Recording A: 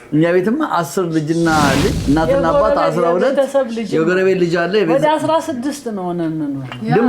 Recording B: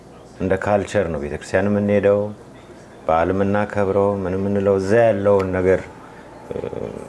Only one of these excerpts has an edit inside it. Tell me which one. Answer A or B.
A